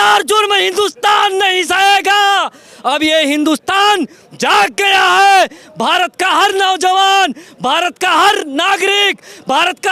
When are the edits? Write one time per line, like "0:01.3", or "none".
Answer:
none